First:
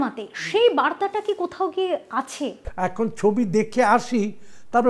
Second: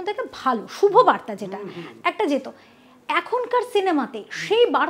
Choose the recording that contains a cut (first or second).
first